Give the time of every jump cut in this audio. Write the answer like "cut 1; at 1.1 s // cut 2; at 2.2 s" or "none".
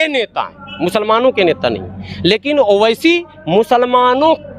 none